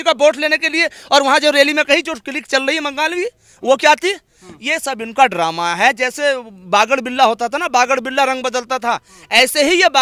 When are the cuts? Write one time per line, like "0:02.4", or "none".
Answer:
none

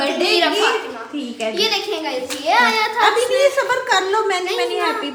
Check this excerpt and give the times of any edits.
none

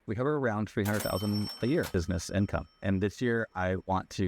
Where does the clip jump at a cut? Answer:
0:01.9

